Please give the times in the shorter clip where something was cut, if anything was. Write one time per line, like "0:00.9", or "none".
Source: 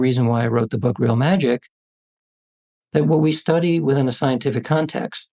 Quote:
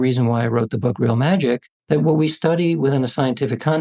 0:01.7